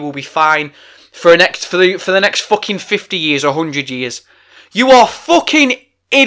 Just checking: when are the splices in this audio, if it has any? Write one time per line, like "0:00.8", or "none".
none